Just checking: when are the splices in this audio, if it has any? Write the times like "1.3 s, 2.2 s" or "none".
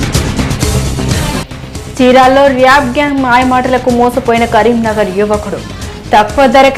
none